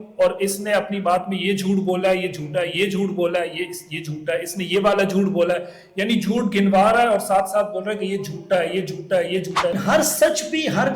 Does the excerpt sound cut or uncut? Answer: cut